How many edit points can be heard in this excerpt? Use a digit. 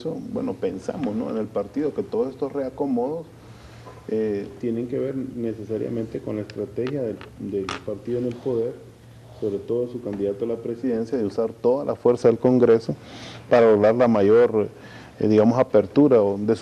0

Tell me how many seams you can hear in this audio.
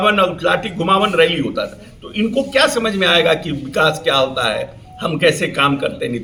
0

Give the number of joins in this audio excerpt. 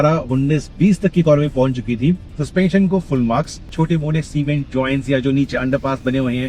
2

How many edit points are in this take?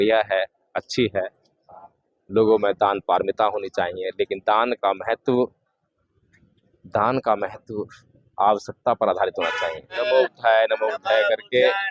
1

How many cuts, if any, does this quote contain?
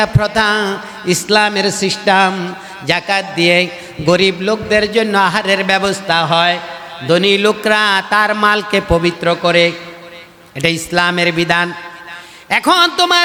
0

